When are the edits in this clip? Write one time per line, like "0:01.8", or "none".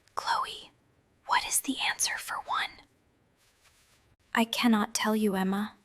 0:04.1